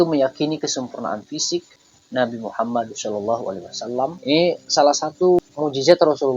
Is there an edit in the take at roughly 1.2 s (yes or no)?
no